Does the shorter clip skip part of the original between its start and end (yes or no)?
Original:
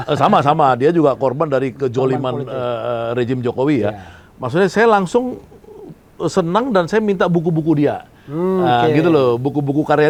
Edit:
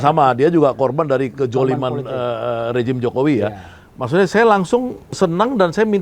yes